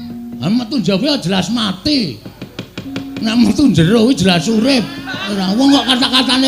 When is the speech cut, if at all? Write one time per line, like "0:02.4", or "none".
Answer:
0:05.3